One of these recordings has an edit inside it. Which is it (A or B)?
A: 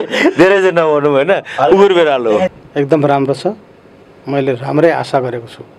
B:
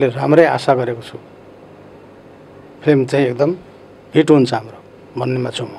A